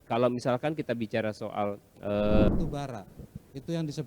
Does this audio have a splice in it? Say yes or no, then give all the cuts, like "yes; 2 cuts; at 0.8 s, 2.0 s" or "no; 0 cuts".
yes; 1 cut; at 2.5 s